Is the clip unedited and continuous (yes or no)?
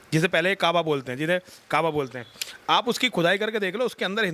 yes